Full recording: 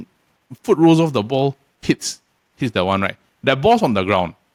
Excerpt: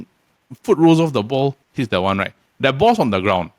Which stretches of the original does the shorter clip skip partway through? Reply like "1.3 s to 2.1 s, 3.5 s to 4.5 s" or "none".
1.6 s to 2.5 s